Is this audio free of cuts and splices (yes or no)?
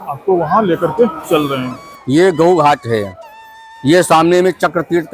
no